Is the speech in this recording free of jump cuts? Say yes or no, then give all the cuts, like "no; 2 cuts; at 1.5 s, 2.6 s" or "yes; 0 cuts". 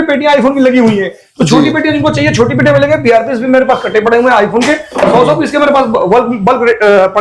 yes; 0 cuts